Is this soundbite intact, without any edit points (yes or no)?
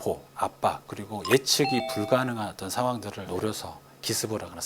no